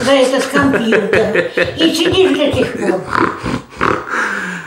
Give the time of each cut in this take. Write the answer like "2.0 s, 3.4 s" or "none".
none